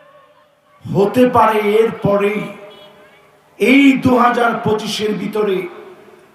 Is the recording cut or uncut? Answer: uncut